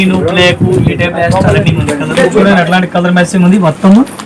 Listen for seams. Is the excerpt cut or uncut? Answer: cut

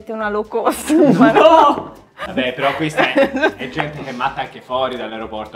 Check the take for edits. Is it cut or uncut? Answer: cut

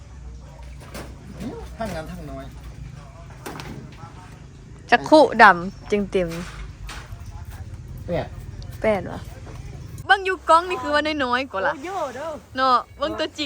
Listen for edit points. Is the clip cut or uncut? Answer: cut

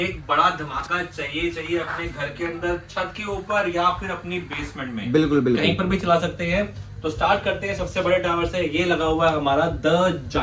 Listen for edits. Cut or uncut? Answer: uncut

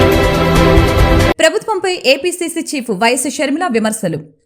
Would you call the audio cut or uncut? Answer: uncut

